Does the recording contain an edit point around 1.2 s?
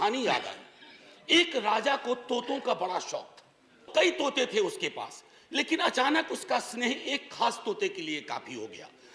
no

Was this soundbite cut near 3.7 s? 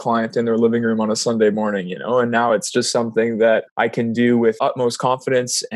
yes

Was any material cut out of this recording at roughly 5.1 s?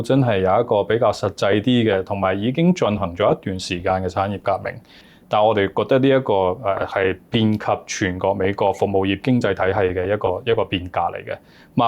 yes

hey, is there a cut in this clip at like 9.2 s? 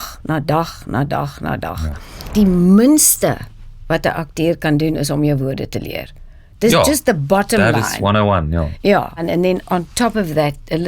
yes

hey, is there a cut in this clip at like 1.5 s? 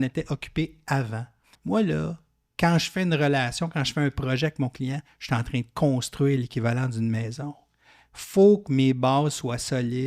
yes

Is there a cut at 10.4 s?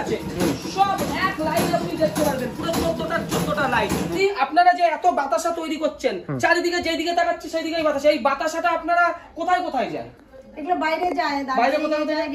no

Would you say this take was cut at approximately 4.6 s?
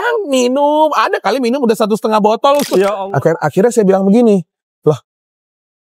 no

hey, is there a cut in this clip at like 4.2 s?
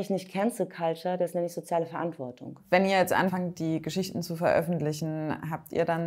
no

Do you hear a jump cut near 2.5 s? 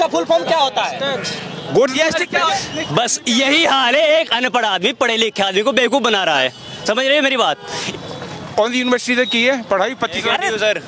yes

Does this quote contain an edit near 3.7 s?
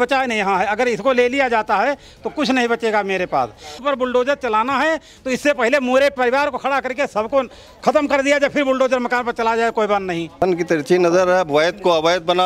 yes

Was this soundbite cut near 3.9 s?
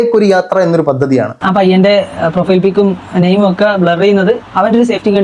no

